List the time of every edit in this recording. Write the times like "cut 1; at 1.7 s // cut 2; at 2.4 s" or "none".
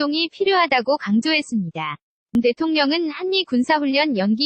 cut 1; at 2.3 s